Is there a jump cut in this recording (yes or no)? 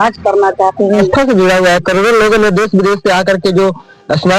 yes